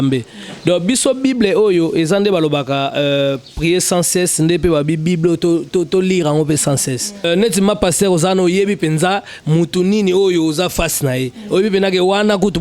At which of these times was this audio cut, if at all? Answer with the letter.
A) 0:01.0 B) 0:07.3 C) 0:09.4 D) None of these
B